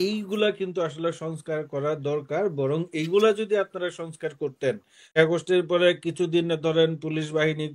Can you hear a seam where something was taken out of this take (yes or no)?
yes